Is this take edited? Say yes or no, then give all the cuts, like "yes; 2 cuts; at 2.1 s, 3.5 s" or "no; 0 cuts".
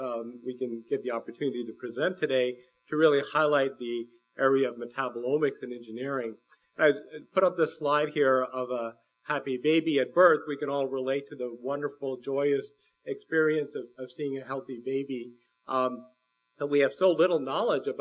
yes; 1 cut; at 1.3 s